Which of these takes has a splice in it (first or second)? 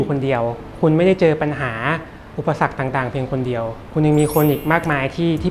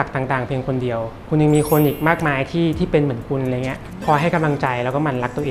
second